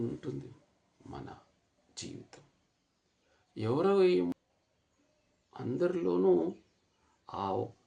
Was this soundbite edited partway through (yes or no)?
yes